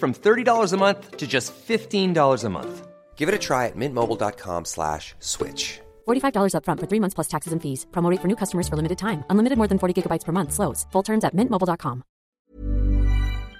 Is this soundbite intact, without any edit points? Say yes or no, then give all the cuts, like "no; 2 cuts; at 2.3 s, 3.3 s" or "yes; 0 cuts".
no; 1 cut; at 12.4 s